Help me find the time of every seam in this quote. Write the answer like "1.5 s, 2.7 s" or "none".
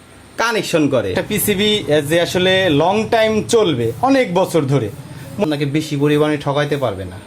1.1 s, 5.5 s